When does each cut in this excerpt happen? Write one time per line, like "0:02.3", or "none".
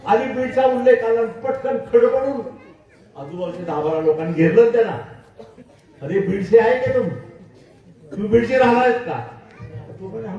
none